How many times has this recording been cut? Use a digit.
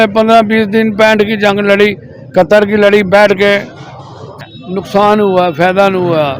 1